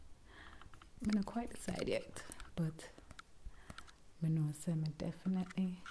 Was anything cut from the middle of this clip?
no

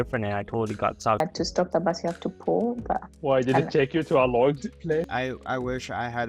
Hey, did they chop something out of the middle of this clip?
yes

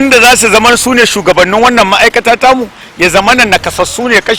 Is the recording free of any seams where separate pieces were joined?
yes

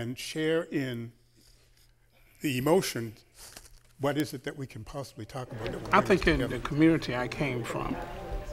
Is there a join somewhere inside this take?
yes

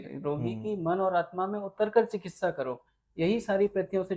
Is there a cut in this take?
no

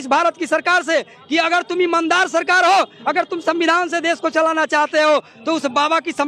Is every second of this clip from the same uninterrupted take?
yes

